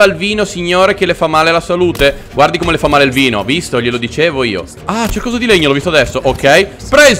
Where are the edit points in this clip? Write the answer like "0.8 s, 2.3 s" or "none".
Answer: 4.8 s